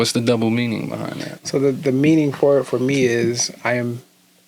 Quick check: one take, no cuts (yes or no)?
yes